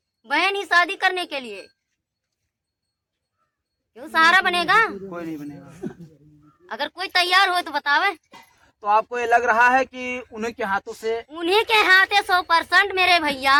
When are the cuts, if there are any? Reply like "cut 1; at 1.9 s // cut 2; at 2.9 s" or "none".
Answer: none

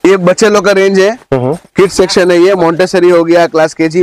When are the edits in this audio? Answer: none

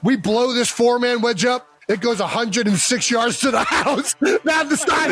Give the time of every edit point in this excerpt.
none

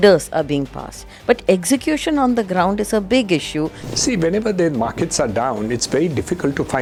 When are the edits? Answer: none

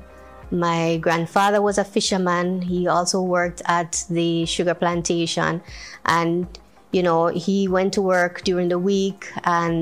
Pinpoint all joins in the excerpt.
none

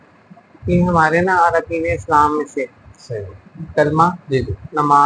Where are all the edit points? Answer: none

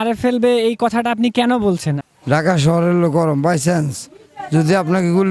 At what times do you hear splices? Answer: cut 1; at 2.0 s

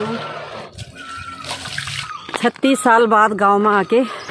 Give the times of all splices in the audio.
cut 1; at 2.0 s

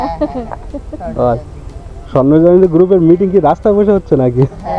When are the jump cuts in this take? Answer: none

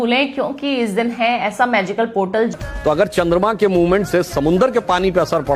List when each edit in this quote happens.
cut 1; at 2.5 s

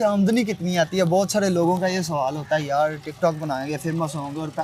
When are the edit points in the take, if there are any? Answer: none

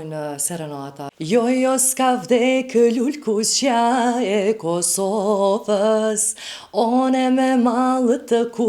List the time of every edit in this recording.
cut 1; at 1.1 s

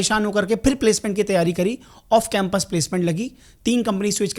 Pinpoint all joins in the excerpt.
none

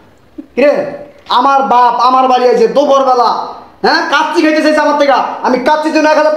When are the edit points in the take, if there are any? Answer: none

